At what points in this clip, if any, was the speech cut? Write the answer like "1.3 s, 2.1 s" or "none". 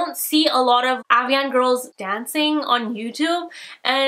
2.0 s

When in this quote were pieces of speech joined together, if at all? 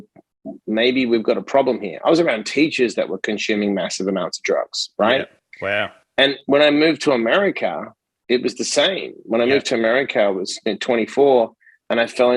none

